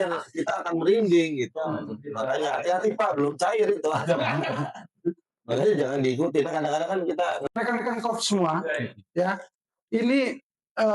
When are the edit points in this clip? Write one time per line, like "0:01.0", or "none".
0:07.4